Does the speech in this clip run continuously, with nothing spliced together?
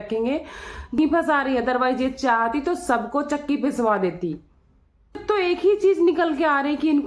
no; 2 cuts; at 1.0 s, 5.2 s

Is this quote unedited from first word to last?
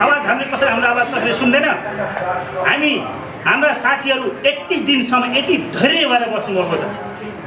yes; 0 cuts

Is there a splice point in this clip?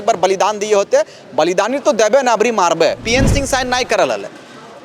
yes; 1 cut; at 3.0 s

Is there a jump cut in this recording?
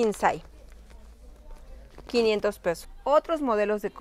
yes; 1 cut; at 2.9 s

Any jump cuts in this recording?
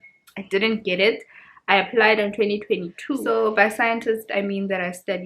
yes; 1 cut; at 3.2 s

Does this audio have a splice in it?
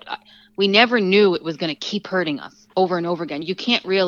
yes; 1 cut; at 2.6 s

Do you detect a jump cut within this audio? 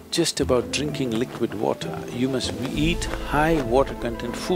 no; 0 cuts

